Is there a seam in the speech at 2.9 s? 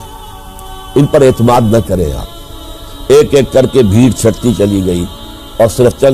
yes; 1 cut; at 2.9 s

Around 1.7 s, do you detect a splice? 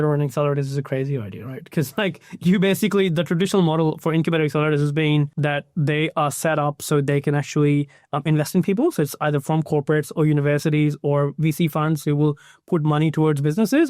no; 1 cut; at 5.3 s

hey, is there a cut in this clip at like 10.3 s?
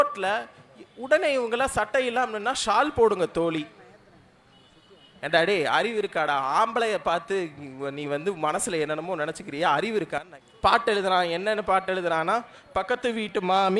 yes; 1 cut; at 10.3 s

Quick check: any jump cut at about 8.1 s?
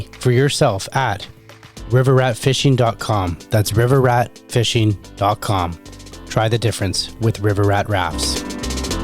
yes; 1 cut; at 8.1 s

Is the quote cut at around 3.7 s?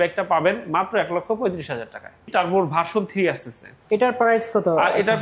yes; 2 cuts; at 2.3 s, 3.7 s

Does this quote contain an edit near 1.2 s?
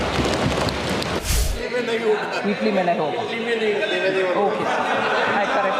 yes; 1 cut; at 1.2 s

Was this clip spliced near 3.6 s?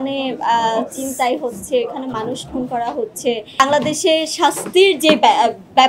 yes; 1 cut; at 3.6 s

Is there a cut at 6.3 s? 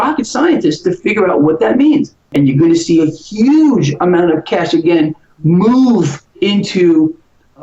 no; 1 cut; at 2.2 s

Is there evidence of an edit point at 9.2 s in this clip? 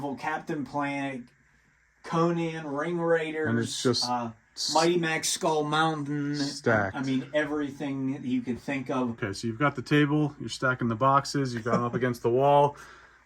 yes; 1 cut; at 9.2 s

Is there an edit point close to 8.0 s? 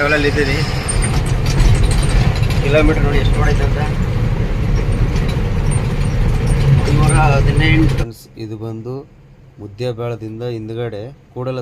yes; 1 cut; at 8.0 s

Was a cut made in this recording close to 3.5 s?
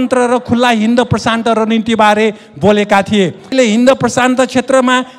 yes; 1 cut; at 3.5 s

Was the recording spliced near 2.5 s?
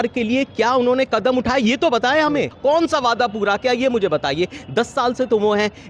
yes; 1 cut; at 2.5 s

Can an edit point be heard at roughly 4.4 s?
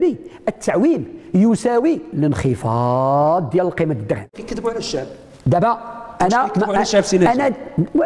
yes; 1 cut; at 4.4 s

